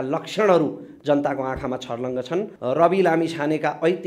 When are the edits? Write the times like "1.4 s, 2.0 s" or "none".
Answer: 2.5 s